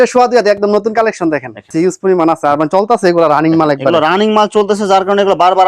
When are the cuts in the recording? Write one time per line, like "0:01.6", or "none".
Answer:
0:01.7